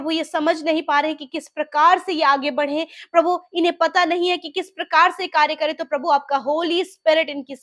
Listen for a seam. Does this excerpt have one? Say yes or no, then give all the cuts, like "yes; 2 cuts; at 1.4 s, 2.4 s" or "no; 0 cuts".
no; 0 cuts